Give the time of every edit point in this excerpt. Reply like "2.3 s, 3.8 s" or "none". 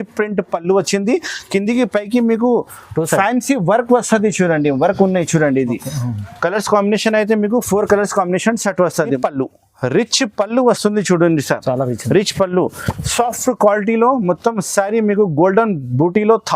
9.1 s